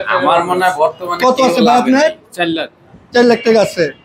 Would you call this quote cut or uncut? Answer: uncut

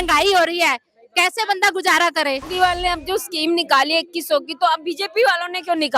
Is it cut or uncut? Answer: cut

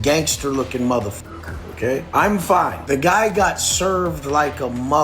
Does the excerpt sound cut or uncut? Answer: cut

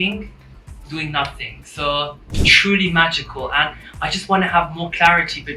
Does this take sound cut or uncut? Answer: cut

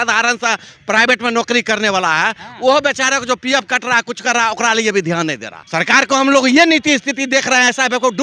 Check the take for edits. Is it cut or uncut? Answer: cut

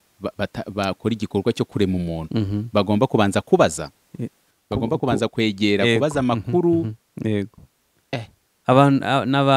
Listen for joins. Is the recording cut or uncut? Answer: uncut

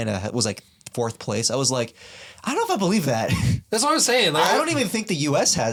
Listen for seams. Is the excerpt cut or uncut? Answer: uncut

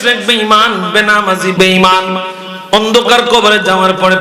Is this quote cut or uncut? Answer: cut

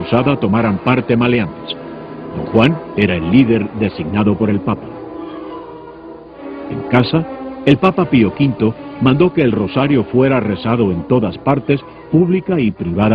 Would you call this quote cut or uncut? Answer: uncut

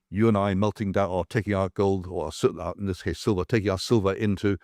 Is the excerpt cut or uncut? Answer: uncut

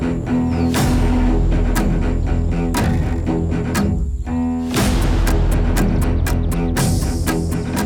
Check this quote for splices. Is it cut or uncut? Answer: uncut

